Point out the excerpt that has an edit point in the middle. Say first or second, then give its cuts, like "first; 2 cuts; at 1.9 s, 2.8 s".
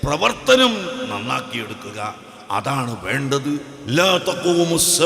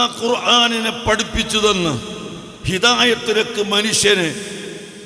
first; 1 cut; at 3.7 s